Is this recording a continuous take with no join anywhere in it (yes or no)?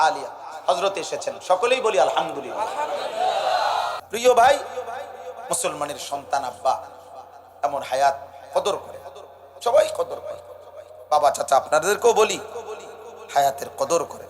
no